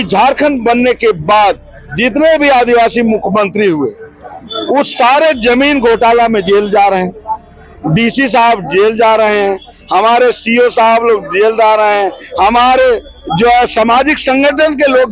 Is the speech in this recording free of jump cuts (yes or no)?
yes